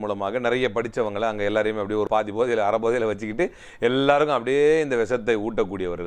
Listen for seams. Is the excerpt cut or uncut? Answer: cut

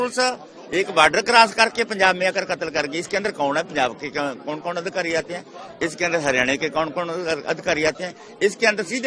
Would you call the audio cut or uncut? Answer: uncut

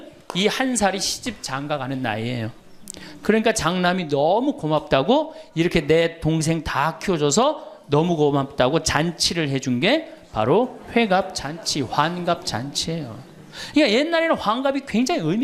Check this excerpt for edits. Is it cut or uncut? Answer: uncut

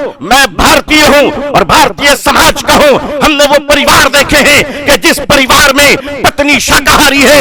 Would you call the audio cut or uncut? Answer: uncut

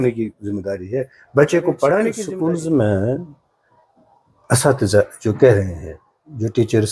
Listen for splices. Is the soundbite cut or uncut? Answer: cut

